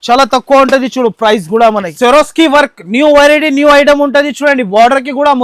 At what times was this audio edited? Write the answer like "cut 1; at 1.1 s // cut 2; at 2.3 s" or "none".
cut 1; at 1.9 s